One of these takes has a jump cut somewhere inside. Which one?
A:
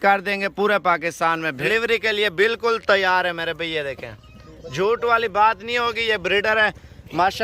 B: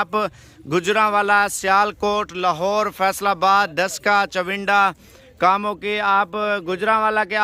A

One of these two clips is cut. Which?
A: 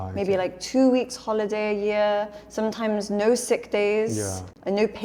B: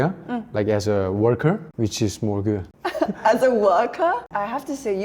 B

